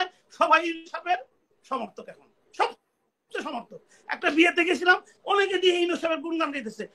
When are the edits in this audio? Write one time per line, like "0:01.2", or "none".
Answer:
none